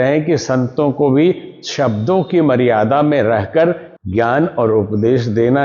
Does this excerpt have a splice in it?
no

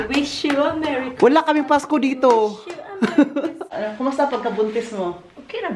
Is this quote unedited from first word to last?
no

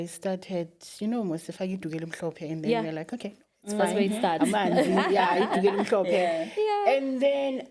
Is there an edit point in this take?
no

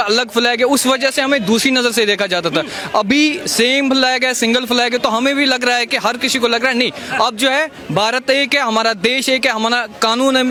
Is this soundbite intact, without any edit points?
yes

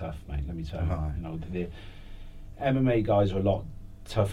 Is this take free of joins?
yes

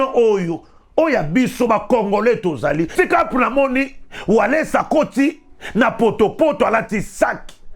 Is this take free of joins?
no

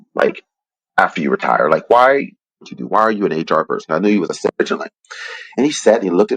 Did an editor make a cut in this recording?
no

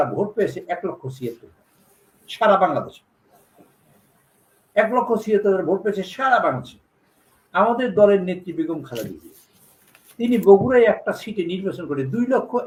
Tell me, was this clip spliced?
no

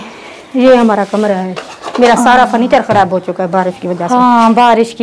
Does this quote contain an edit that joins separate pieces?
no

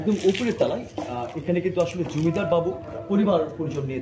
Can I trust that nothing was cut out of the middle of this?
no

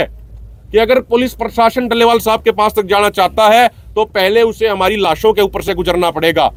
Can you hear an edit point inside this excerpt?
no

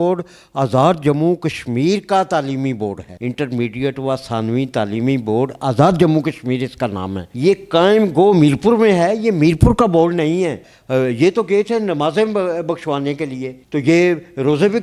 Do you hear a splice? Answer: yes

